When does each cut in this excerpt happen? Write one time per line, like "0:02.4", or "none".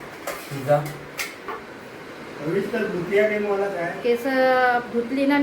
0:01.6

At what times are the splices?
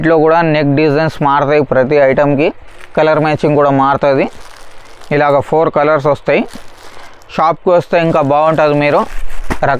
none

